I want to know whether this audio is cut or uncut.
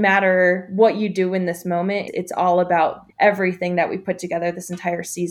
cut